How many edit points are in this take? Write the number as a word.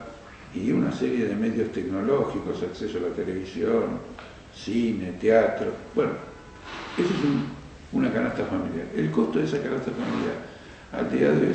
one